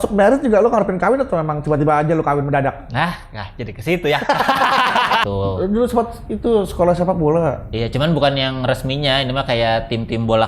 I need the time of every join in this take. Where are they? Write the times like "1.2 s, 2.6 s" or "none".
5.2 s